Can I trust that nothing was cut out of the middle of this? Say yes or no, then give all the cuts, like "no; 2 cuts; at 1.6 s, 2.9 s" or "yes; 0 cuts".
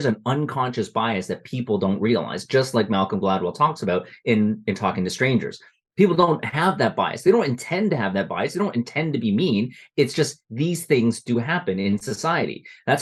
yes; 0 cuts